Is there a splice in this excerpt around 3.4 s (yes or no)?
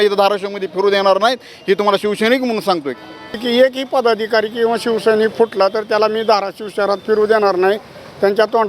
yes